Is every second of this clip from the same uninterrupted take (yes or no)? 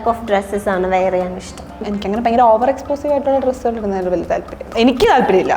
no